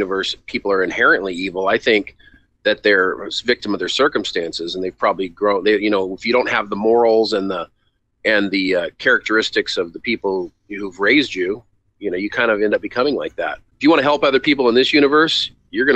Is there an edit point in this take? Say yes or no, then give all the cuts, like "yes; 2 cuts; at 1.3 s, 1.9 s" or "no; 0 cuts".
yes; 1 cut; at 13.6 s